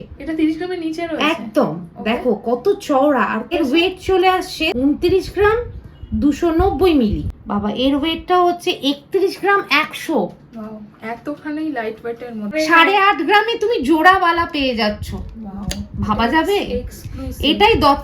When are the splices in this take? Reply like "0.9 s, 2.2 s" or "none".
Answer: 3.4 s, 4.7 s, 7.3 s, 12.5 s